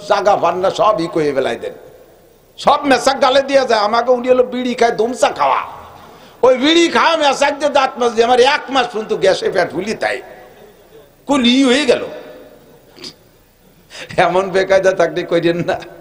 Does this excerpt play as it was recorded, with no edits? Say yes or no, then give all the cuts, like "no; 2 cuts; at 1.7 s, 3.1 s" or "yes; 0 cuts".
yes; 0 cuts